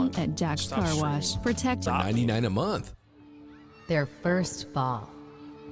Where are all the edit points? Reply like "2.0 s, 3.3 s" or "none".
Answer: 1.9 s